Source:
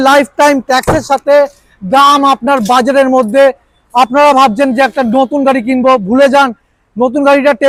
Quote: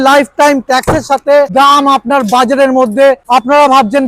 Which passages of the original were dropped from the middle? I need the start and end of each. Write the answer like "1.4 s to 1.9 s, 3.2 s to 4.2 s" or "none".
1.5 s to 1.9 s, 3.6 s to 3.9 s